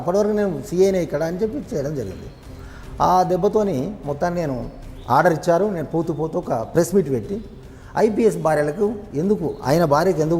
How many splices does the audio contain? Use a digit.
0